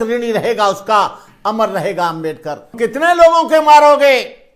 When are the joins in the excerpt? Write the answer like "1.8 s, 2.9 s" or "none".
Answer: 2.7 s